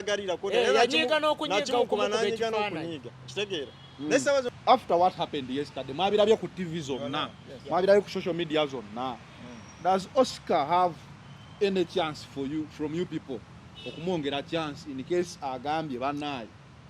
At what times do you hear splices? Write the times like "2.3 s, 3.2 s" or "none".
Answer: 4.5 s